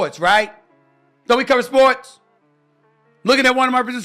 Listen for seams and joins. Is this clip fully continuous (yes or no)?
yes